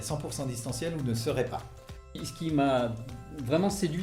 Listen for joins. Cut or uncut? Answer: cut